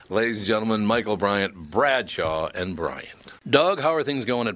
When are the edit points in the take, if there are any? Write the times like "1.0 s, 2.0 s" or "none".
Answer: 3.4 s